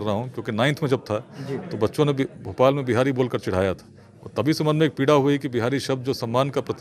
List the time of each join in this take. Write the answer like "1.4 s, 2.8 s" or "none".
none